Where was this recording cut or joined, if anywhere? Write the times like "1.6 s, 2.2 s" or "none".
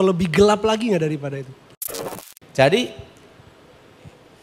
2.0 s